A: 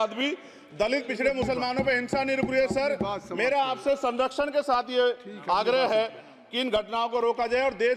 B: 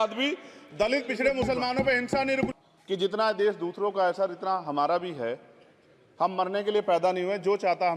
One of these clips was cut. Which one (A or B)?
B